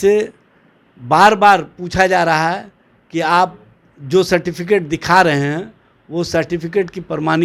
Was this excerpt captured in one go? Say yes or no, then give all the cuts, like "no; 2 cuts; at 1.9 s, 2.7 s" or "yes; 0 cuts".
yes; 0 cuts